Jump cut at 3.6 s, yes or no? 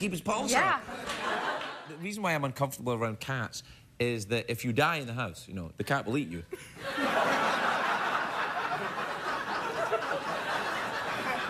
no